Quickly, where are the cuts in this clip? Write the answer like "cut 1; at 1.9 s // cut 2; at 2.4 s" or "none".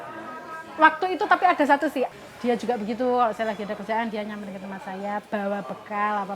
cut 1; at 2.2 s